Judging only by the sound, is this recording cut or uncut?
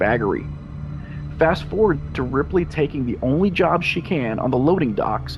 uncut